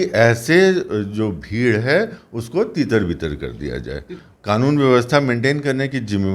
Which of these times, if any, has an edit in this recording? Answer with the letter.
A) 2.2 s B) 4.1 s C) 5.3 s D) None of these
B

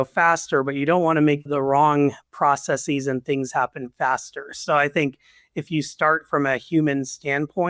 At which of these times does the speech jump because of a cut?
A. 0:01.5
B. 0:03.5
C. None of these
A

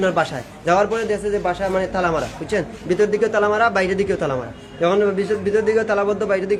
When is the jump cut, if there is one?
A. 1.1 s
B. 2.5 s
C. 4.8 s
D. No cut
D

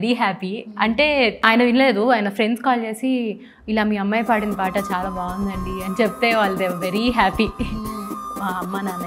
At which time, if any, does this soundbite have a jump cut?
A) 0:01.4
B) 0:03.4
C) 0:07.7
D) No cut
A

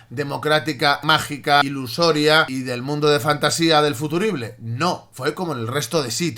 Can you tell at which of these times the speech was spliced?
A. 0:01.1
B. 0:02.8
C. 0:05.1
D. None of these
C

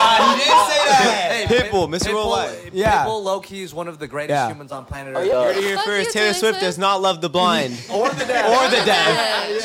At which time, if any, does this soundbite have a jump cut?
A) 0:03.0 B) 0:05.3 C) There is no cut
B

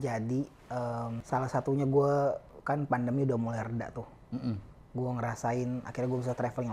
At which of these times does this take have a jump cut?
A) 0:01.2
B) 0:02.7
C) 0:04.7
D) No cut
A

